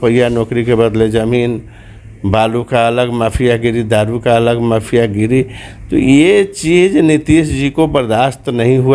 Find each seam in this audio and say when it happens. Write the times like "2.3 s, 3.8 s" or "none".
none

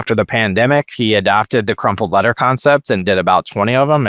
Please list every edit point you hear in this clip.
0.9 s

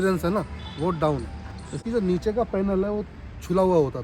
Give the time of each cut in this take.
1.8 s

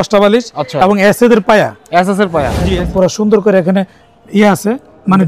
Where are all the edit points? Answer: 2.6 s

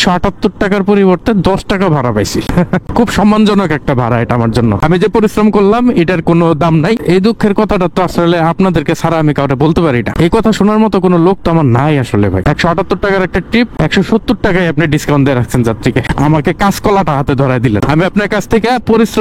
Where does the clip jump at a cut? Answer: 7.0 s, 12.4 s, 13.8 s

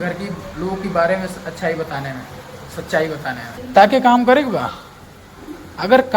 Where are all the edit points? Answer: 3.6 s

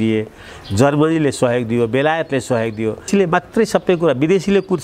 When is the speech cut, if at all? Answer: 3.1 s

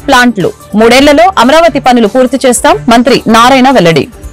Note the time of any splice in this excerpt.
none

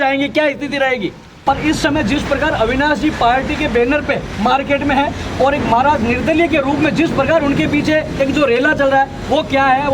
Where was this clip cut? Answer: 1.4 s

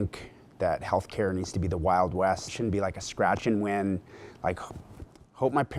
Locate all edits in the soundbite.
2.5 s

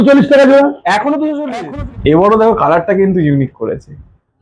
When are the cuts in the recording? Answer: 1.4 s

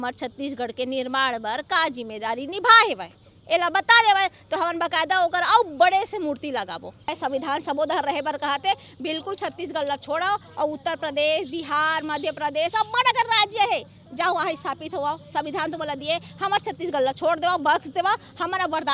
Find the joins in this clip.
7.2 s

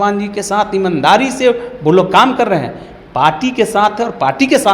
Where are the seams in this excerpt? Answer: none

